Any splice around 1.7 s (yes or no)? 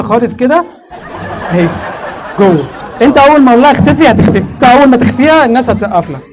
no